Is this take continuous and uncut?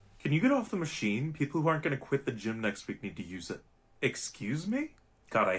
no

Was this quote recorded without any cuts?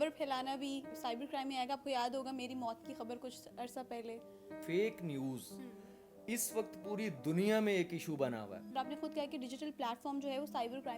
no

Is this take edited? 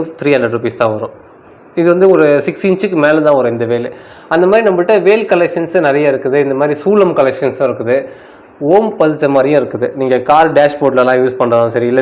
no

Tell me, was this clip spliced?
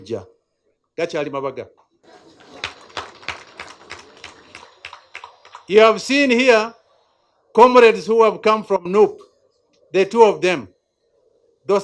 no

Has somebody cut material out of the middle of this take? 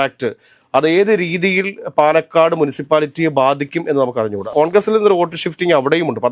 yes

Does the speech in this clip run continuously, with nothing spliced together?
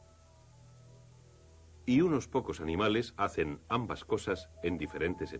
no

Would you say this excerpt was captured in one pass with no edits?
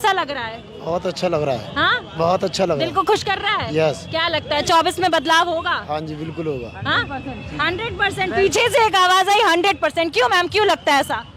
yes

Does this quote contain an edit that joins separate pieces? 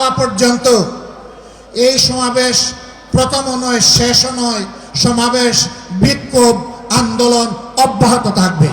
no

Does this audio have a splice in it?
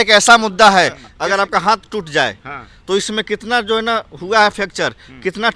yes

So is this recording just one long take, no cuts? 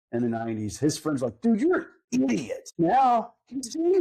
no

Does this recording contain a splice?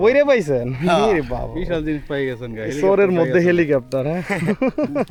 no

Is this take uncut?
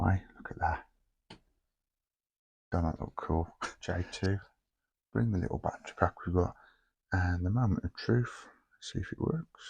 no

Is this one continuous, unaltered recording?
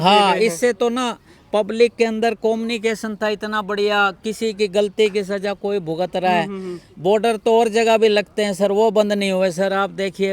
yes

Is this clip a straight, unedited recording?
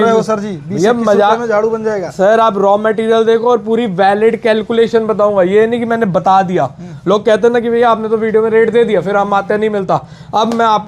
yes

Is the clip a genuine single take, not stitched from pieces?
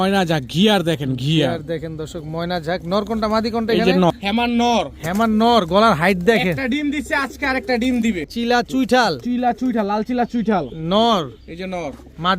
no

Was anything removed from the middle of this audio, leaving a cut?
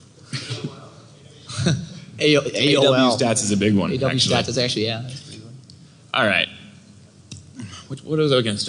yes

